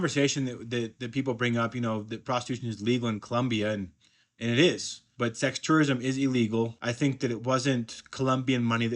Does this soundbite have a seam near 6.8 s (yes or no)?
yes